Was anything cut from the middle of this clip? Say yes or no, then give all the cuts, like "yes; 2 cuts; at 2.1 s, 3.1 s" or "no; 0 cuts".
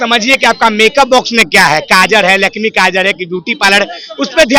no; 0 cuts